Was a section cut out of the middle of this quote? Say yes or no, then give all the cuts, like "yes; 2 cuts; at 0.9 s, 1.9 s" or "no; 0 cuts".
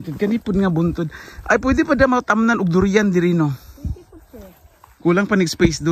no; 0 cuts